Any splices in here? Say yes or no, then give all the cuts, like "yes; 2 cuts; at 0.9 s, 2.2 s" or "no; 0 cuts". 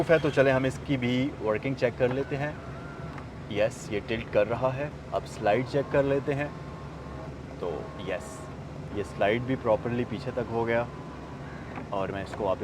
no; 0 cuts